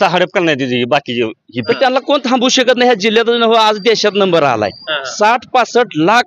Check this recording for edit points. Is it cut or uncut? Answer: cut